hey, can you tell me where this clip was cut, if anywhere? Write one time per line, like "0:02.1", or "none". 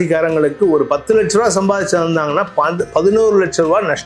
none

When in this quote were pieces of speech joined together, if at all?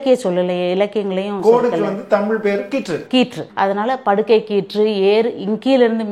0:03.4

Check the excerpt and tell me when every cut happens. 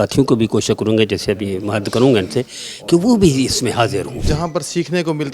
0:04.2

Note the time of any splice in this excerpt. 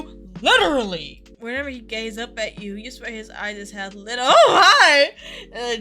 0:01.3

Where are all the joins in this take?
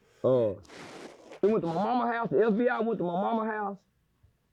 0:01.3

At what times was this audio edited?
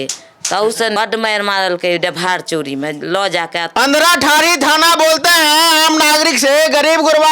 0:01.0
0:03.7

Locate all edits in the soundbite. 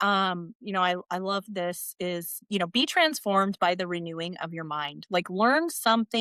0:02.4

